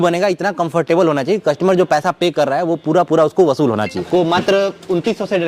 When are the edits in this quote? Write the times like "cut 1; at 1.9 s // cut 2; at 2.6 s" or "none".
cut 1; at 4.0 s